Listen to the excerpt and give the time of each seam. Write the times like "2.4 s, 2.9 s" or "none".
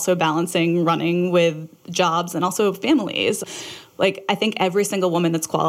3.4 s